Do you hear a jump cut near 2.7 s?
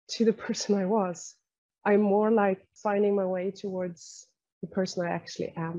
yes; 1 cut; at 2.7 s

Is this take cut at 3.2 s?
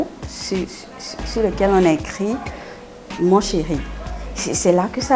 no; 0 cuts

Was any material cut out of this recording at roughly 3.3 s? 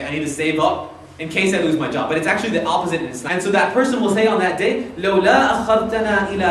no; 0 cuts

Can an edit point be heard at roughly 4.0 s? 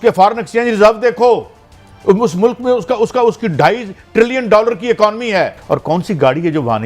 no; 1 cut; at 5.6 s

